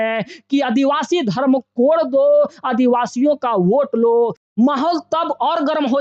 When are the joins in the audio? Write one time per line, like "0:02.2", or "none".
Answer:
0:04.4